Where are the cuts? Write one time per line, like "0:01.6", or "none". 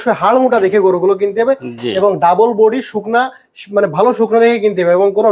none